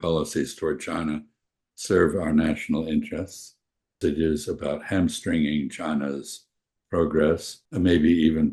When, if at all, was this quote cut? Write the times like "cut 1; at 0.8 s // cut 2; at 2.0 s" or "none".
cut 1; at 4.0 s // cut 2; at 7.6 s

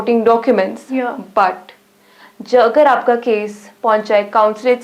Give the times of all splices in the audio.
none

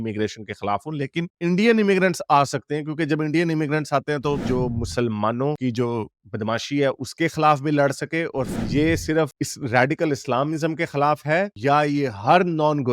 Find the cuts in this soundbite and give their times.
cut 1; at 4.4 s // cut 2; at 8.6 s

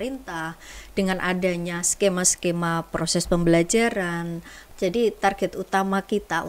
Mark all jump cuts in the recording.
cut 1; at 4.6 s

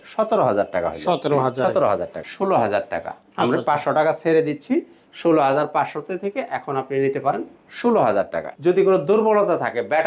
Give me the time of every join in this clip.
cut 1; at 2.2 s // cut 2; at 8.5 s

